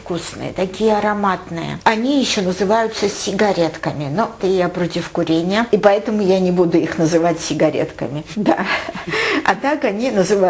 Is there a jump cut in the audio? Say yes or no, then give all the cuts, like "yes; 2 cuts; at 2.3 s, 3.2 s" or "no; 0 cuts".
yes; 3 cuts; at 1.8 s, 4.4 s, 8.3 s